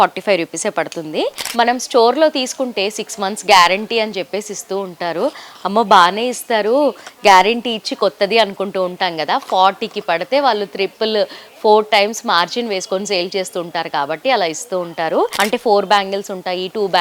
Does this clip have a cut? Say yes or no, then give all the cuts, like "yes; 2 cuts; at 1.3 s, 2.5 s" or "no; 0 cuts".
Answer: yes; 2 cuts; at 1.4 s, 15.3 s